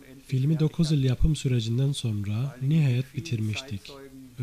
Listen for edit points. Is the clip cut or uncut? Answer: uncut